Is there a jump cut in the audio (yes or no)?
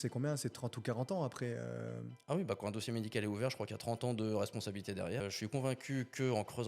yes